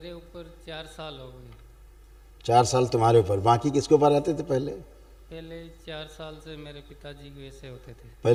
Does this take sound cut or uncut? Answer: uncut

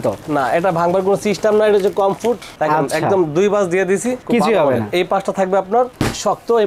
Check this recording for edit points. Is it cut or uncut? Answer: uncut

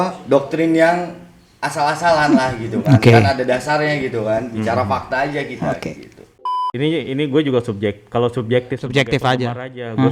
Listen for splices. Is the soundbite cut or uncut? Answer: cut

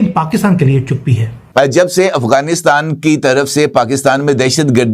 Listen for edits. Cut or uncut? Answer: cut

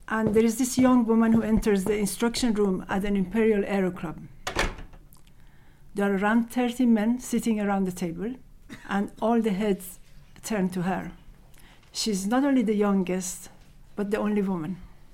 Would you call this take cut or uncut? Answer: uncut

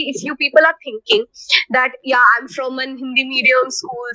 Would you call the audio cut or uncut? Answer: uncut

